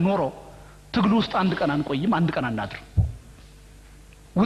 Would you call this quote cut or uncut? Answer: uncut